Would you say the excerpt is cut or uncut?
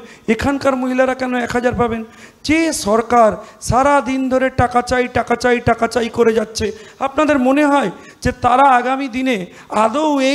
uncut